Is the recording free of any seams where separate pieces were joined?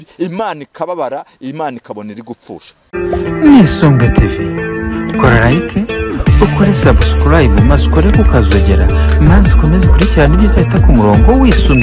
no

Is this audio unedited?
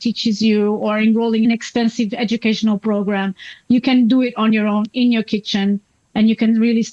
yes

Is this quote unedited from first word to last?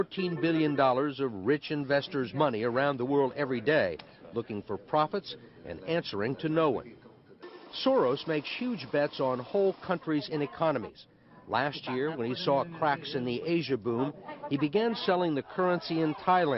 yes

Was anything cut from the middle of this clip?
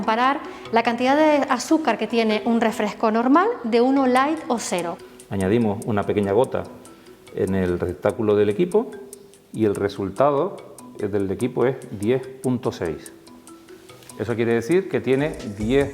yes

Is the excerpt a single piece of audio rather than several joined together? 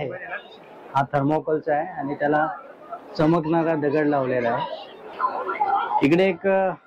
no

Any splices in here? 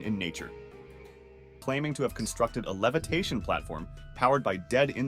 yes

